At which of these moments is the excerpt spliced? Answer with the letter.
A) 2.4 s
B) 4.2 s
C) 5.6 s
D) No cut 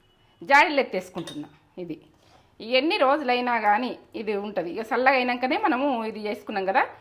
D